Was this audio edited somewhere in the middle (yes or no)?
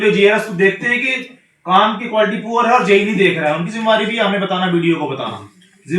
no